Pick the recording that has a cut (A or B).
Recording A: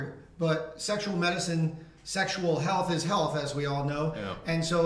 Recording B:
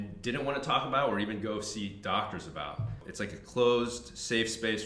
B